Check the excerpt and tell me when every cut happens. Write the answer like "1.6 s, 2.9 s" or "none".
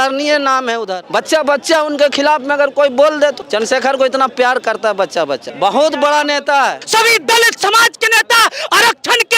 1.0 s, 3.4 s, 5.5 s, 6.8 s

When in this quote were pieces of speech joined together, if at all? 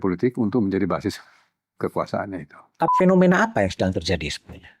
2.9 s

